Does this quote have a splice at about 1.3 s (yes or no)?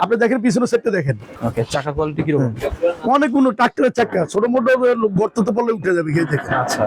yes